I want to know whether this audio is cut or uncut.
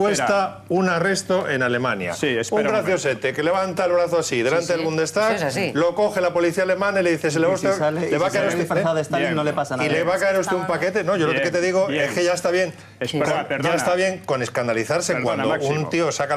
uncut